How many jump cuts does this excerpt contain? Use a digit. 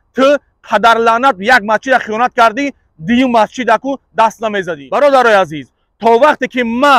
1